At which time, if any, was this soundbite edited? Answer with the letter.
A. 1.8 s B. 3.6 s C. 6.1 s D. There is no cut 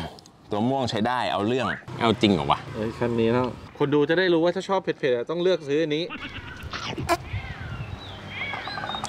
A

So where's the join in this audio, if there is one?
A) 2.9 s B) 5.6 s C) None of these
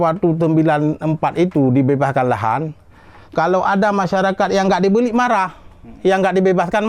C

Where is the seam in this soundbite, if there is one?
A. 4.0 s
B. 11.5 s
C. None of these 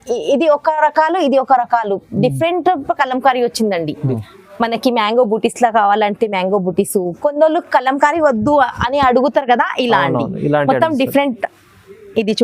A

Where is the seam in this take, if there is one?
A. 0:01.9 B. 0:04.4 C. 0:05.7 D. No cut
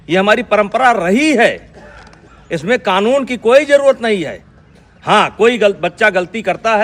D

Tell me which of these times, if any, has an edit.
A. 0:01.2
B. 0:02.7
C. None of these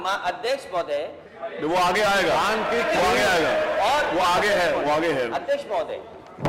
A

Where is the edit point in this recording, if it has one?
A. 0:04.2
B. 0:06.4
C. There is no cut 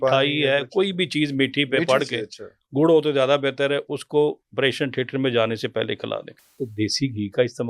B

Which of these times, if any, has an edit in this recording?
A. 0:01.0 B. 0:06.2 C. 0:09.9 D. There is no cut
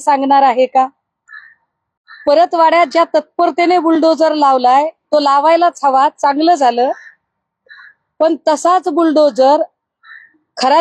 D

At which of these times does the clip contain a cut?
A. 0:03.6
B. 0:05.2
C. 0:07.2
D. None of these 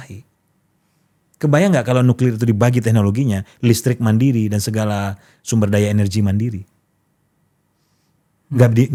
D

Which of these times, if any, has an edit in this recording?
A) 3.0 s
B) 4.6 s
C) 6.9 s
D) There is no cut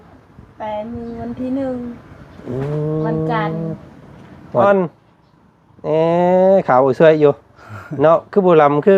B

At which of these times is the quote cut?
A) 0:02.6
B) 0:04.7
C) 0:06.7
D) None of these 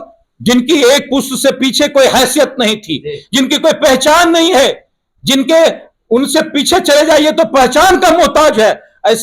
D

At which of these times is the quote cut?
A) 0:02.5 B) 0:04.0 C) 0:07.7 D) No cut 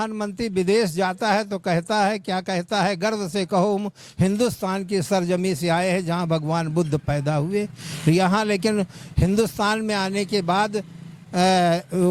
D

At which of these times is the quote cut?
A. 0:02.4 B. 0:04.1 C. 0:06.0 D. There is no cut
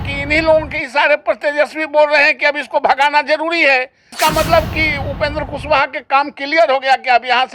B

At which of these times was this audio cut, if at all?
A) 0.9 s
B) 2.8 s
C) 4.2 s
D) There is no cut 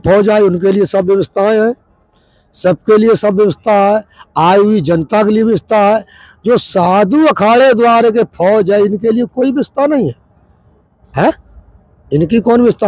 D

